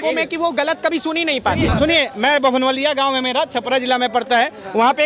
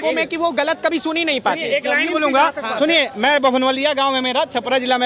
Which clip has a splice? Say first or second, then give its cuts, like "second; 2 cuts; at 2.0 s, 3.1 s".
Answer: first; 1 cut; at 1.6 s